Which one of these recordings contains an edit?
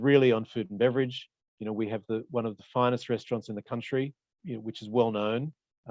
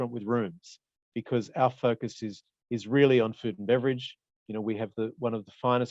first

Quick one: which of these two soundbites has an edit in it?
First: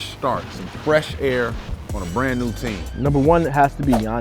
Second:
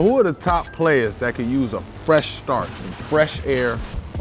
first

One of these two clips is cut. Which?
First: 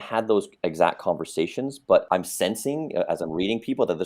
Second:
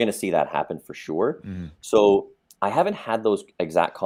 first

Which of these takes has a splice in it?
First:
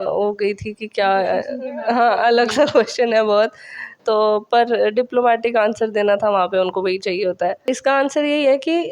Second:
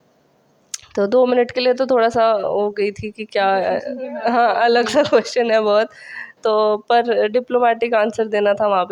first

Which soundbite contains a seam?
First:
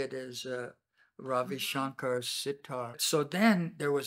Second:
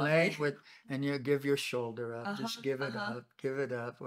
first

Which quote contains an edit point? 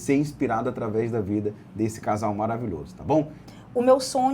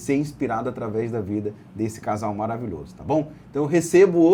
first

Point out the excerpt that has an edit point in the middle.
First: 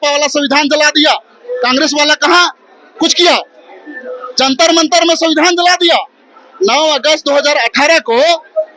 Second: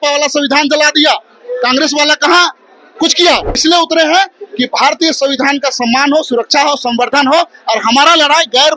second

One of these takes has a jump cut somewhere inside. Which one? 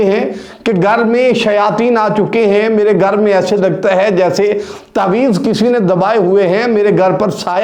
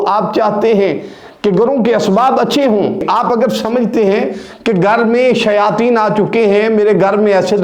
second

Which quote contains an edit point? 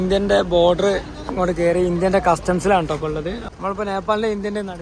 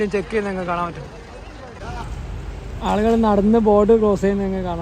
first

